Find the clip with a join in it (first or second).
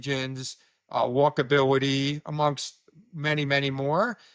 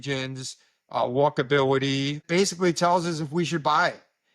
second